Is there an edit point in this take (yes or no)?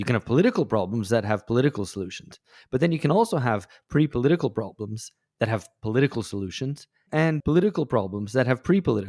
yes